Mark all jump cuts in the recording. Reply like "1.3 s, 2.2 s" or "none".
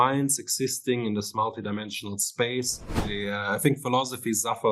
3.0 s